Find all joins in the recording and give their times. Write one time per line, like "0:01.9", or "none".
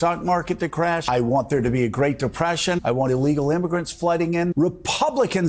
0:01.0
0:02.8
0:04.5